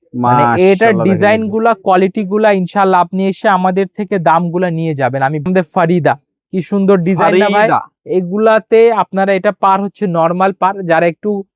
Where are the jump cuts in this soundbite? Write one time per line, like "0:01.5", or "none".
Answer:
0:05.5

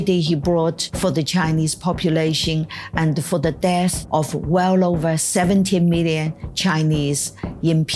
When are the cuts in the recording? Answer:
0:00.9
0:04.0

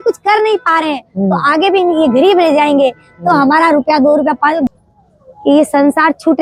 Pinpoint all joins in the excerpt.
0:04.7

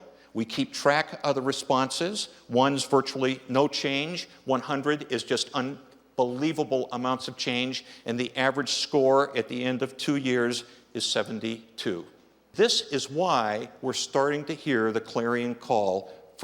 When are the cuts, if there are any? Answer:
0:12.5

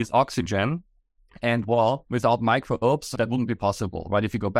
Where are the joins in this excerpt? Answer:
0:02.0
0:03.1

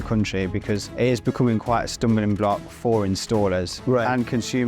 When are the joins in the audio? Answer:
0:00.9
0:03.7

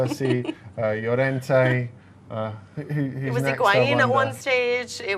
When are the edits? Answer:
0:02.7

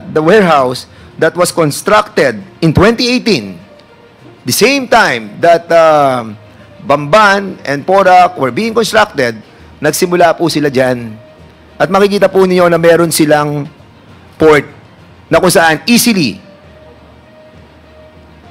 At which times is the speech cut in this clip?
none

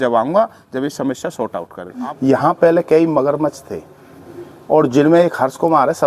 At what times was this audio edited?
0:02.0

